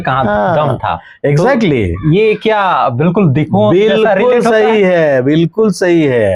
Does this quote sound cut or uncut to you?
uncut